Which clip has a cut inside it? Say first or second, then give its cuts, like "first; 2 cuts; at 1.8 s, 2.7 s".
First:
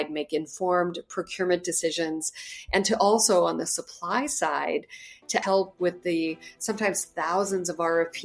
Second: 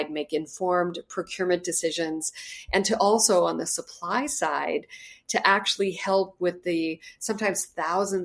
first; 1 cut; at 5.4 s